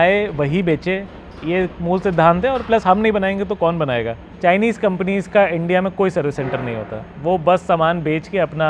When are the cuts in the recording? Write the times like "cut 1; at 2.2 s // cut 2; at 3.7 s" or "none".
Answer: cut 1; at 4.2 s